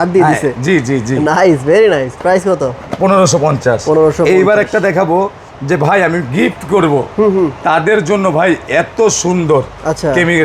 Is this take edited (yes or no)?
no